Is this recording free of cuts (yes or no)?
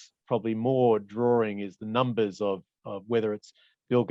yes